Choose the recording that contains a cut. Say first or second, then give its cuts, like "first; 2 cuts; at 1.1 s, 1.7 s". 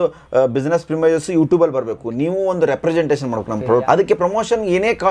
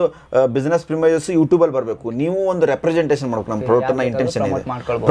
first; 1 cut; at 3.8 s